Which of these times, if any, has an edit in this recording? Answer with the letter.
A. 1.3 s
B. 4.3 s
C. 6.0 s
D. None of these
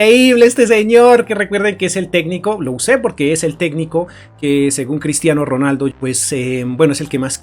C